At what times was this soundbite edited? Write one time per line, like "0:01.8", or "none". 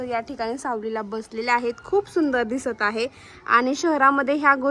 none